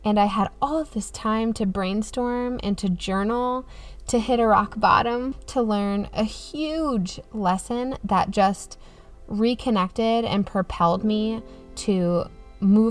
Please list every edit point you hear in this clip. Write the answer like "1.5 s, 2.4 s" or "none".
5.4 s